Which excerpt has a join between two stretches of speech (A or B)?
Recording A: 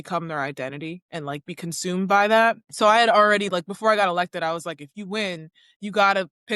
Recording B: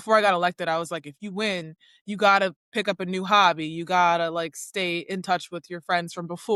A